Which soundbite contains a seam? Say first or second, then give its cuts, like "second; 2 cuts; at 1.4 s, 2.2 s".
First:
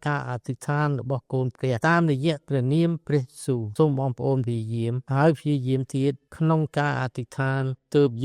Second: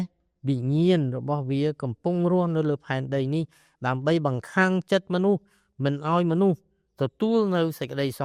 first; 4 cuts; at 1.8 s, 3.7 s, 5.0 s, 6.3 s